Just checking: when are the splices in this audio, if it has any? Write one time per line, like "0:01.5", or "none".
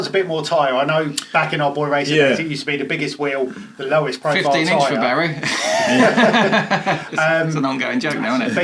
none